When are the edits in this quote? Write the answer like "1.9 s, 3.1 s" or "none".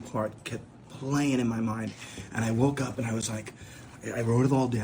none